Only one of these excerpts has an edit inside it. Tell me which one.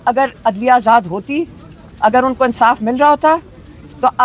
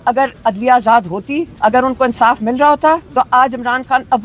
second; 2 cuts; at 1.5 s, 3.1 s

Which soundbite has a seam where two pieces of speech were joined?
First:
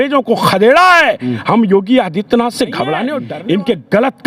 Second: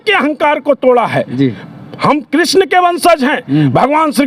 first; 1 cut; at 3.2 s

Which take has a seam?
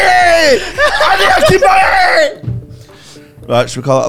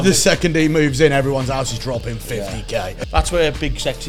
second; 1 cut; at 3.0 s

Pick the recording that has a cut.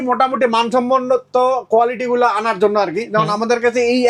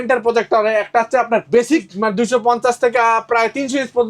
second; 1 cut; at 1.9 s

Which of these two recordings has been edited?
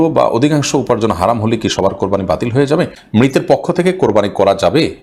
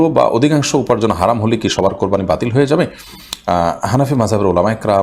first; 1 cut; at 3.0 s

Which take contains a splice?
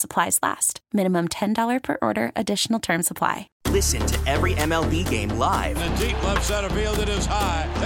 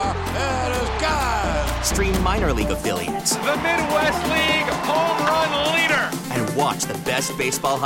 first; 1 cut; at 3.5 s

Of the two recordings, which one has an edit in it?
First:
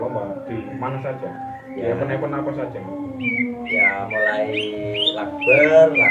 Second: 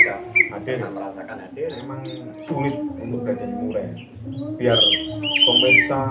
second; 1 cut; at 2.0 s

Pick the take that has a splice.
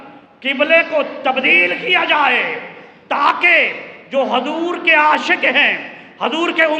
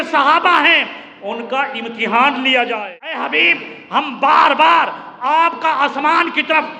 second; 1 cut; at 3.2 s

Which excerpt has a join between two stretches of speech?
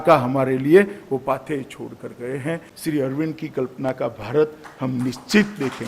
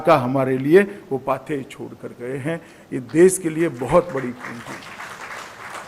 first; 1 cut; at 2.7 s

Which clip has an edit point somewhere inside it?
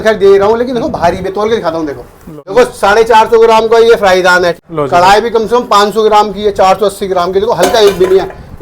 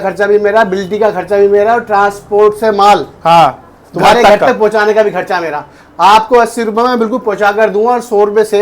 first; 2 cuts; at 2.5 s, 4.6 s

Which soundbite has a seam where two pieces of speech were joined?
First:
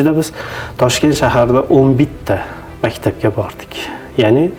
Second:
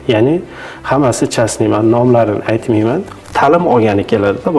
second; 1 cut; at 3.3 s

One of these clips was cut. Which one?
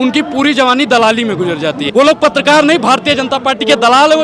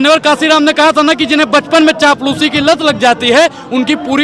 first; 1 cut; at 1.8 s

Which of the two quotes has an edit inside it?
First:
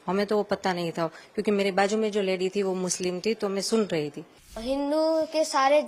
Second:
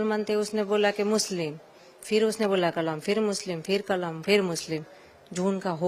first; 1 cut; at 4.6 s

